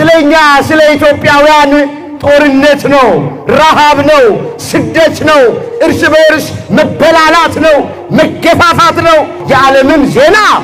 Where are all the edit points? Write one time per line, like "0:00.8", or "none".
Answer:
none